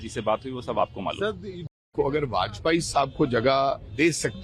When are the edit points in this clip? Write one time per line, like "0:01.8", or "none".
0:01.6